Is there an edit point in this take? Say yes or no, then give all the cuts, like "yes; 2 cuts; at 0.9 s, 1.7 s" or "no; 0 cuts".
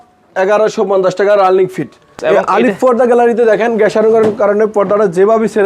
yes; 1 cut; at 2.2 s